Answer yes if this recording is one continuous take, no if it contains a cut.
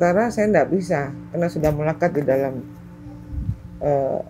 yes